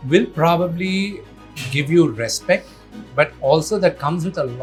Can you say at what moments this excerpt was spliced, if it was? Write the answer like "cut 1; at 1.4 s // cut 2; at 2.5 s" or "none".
none